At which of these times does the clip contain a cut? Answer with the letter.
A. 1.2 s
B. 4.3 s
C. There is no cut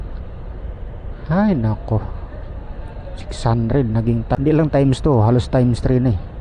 B